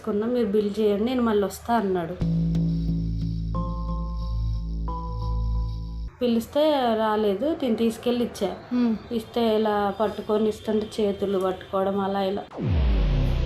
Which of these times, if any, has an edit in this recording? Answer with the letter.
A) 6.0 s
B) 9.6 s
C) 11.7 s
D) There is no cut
A